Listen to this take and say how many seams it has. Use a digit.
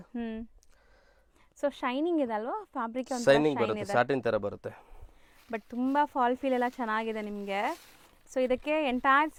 0